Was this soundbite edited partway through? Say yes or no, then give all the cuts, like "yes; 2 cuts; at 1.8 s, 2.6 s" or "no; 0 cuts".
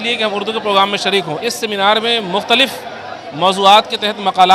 yes; 1 cut; at 1.3 s